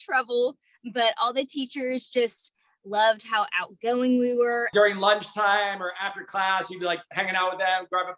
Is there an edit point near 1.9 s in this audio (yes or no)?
no